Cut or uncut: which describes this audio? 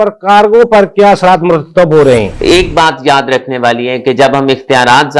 cut